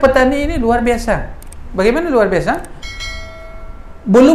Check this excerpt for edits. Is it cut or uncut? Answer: uncut